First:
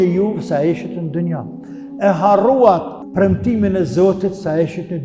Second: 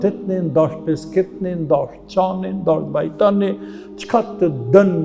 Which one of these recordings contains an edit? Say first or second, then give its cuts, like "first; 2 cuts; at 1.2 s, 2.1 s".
first; 1 cut; at 3.0 s